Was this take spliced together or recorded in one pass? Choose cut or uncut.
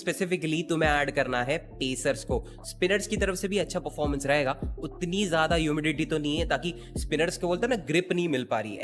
uncut